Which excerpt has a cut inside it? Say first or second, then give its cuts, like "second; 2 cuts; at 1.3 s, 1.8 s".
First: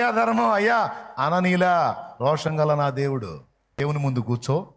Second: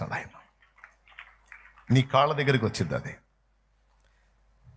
first; 1 cut; at 3.8 s